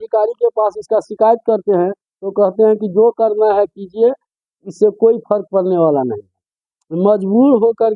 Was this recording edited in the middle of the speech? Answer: no; 0 cuts

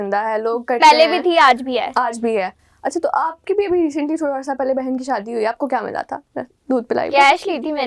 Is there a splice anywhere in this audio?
no; 0 cuts

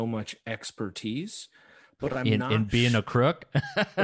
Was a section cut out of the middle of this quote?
yes; 1 cut; at 2.2 s

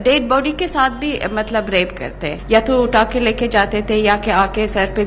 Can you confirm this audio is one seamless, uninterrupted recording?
no; 1 cut; at 2.3 s

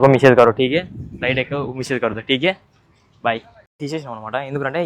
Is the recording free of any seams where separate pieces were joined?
no; 1 cut; at 3.6 s

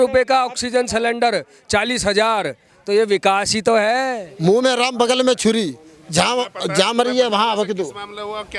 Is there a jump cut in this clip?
yes; 1 cut; at 4.2 s

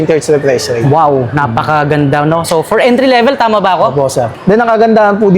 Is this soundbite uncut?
no; 1 cut; at 4.4 s

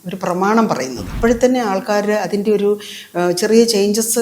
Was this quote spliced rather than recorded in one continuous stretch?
yes; 1 cut; at 1.1 s

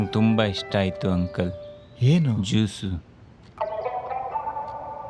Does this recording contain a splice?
no; 0 cuts

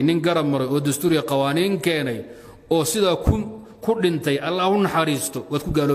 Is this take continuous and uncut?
yes; 0 cuts

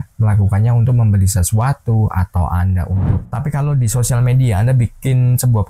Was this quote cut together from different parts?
yes; 1 cut; at 2.9 s

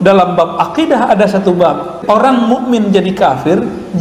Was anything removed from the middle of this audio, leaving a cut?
yes; 1 cut; at 2.0 s

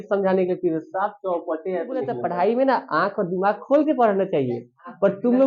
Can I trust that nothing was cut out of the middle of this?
no; 1 cut; at 2.2 s

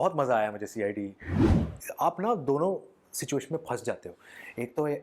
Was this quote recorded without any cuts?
no; 1 cut; at 1.5 s

